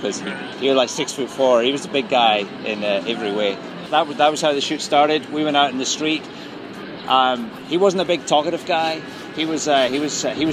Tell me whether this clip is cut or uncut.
cut